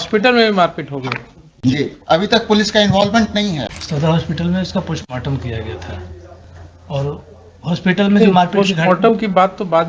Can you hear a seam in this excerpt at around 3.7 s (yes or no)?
yes